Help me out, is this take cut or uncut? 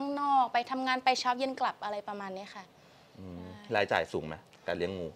uncut